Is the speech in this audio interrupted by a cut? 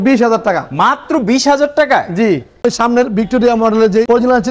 yes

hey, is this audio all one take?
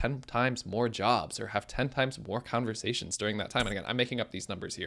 yes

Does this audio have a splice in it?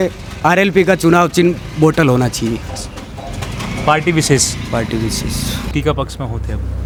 no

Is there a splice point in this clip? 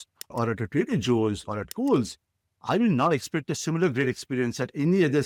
no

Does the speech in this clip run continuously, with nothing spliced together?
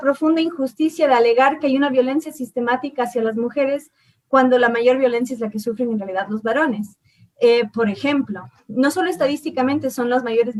yes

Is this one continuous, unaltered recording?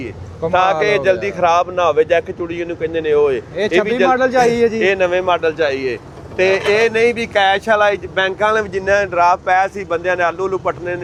yes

